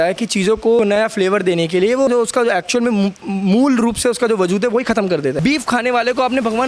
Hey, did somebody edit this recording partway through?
yes; 3 cuts; at 0.8 s, 2.1 s, 5.4 s

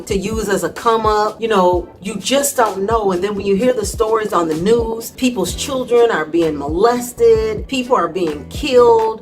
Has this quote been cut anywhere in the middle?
no; 0 cuts

